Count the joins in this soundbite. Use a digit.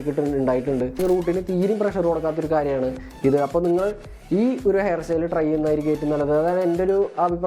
1